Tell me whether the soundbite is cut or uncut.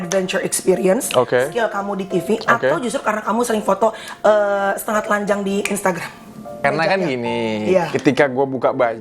cut